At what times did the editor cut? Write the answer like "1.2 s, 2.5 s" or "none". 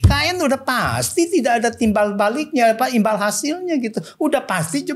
none